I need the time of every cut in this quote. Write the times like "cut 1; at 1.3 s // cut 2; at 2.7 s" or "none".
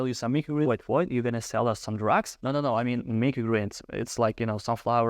none